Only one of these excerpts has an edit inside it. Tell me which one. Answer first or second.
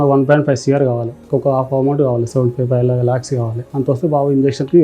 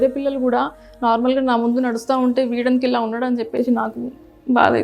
first